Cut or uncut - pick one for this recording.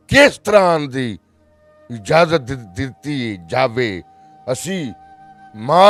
uncut